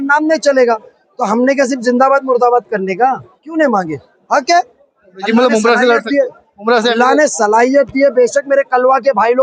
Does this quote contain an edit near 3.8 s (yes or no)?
no